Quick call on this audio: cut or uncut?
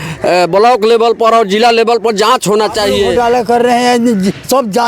cut